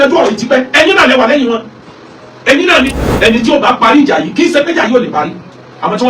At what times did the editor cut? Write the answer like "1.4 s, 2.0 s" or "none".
3.0 s